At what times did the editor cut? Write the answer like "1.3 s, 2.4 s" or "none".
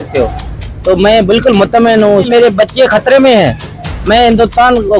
2.3 s